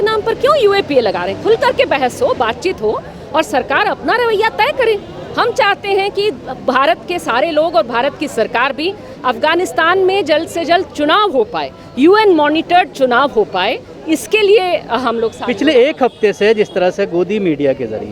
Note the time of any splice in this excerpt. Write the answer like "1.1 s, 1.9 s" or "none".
none